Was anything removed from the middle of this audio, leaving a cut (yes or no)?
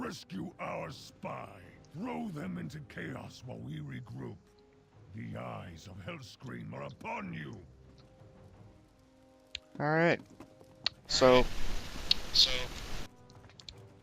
yes